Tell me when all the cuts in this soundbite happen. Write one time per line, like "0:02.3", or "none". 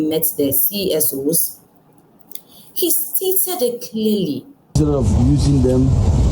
0:04.7

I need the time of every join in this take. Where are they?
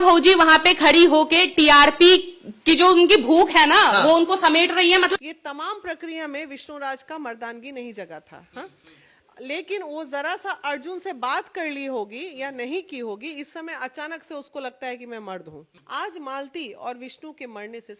0:05.1
0:15.7

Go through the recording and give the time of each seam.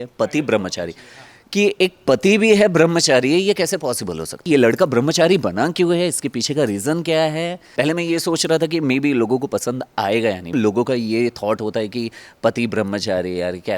0:04.4
0:07.6
0:10.5

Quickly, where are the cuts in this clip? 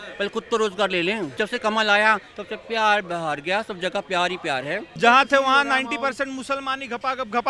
0:01.3
0:04.9

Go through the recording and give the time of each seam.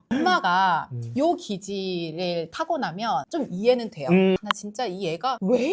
0:04.4

